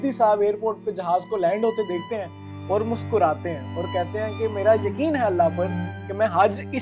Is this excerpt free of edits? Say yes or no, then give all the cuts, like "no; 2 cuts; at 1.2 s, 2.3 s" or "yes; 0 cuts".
yes; 0 cuts